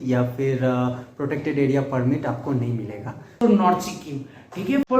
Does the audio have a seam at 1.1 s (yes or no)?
no